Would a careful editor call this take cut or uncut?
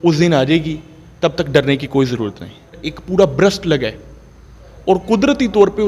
cut